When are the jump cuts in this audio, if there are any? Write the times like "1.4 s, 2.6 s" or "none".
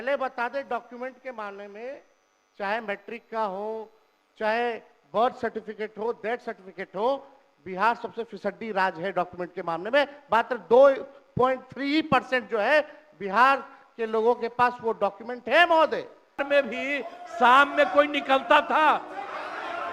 16.4 s